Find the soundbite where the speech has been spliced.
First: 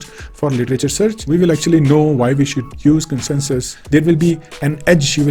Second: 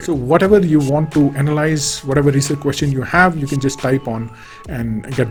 first; 2 cuts; at 1.2 s, 3.7 s

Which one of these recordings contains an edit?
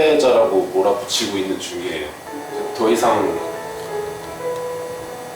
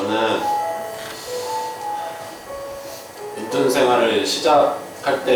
first; 1 cut; at 2.3 s

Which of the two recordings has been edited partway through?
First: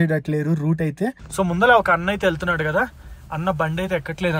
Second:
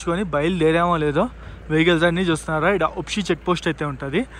first; 1 cut; at 1.2 s

